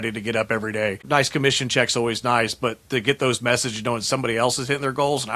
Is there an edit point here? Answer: yes; 1 cut; at 1.0 s

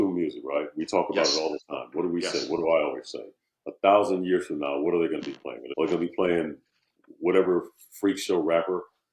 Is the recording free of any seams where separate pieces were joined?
no; 1 cut; at 5.5 s

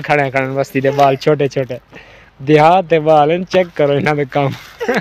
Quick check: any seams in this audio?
no; 0 cuts

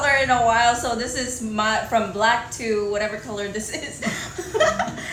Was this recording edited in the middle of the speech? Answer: no; 0 cuts

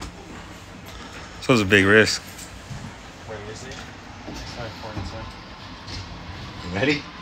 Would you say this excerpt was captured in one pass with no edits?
yes; 0 cuts

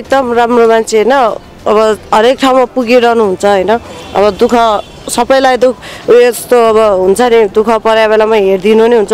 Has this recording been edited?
no; 0 cuts

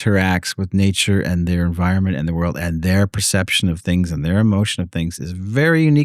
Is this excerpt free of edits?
yes; 0 cuts

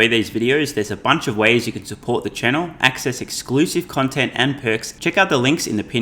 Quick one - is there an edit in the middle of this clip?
yes; 1 cut; at 4.9 s

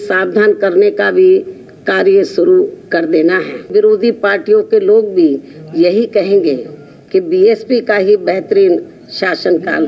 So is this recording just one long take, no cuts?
no; 1 cut; at 3.7 s

